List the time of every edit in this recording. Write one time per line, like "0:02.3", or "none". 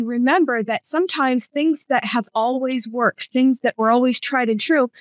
0:03.8